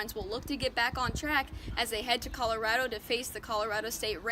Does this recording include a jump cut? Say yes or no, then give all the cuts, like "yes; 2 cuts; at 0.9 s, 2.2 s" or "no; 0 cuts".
no; 0 cuts